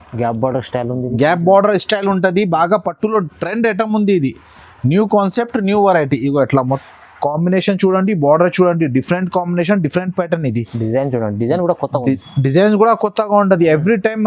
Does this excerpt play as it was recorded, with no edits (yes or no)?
no